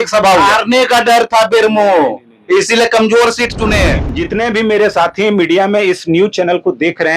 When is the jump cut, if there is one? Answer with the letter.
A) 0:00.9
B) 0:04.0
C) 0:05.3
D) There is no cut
B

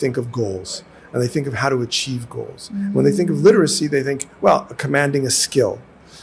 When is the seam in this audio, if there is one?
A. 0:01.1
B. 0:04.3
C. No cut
C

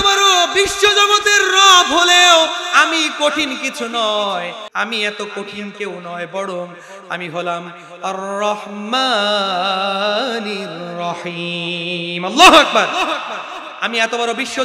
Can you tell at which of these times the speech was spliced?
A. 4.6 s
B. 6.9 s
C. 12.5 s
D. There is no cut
A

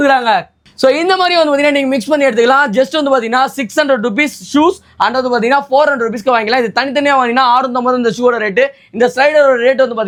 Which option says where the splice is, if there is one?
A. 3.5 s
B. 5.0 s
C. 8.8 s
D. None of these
D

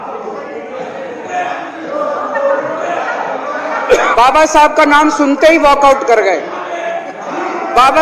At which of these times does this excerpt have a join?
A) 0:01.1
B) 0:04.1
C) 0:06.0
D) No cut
B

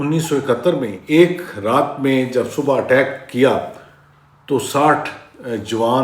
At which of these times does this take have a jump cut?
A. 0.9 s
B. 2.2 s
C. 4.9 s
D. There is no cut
A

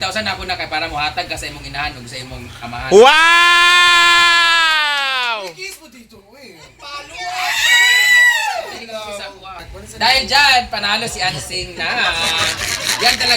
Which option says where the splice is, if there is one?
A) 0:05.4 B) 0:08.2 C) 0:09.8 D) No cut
C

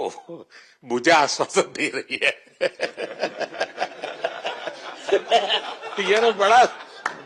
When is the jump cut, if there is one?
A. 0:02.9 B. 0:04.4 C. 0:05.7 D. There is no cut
D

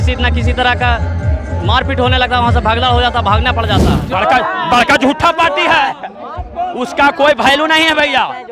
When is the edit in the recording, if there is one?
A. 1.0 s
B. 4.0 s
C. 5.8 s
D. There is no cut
B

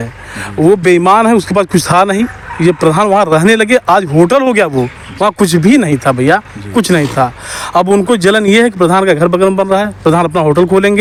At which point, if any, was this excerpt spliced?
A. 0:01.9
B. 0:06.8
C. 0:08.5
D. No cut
D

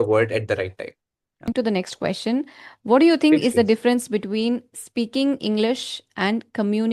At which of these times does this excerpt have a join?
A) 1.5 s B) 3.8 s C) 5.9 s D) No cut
A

